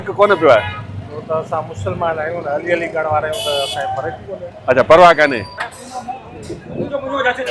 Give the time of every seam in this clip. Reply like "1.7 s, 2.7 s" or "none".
5.6 s